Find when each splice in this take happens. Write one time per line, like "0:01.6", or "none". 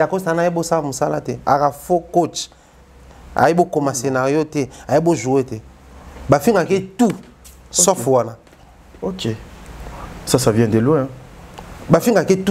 none